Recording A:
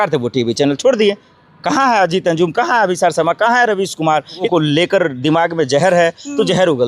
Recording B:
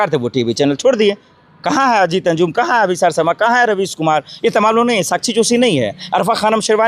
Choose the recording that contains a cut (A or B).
A